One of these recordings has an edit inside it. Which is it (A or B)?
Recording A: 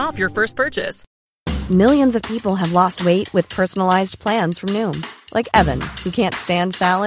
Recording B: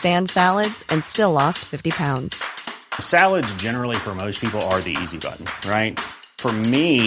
A